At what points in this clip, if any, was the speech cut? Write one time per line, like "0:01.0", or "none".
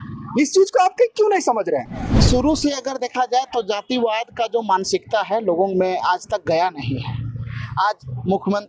0:02.1